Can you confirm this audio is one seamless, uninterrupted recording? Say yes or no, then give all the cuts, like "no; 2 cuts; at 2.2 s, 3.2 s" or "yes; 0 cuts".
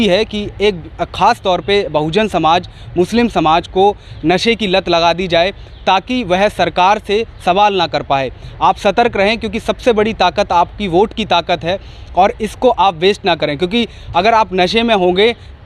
yes; 0 cuts